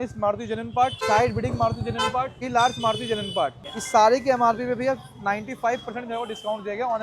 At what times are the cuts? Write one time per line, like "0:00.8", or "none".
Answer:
0:01.0
0:02.4
0:03.6